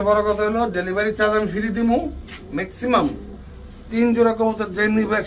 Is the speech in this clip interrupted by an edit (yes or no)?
no